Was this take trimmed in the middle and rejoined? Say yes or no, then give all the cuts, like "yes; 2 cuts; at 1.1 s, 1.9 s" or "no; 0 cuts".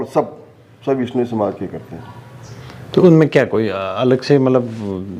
no; 0 cuts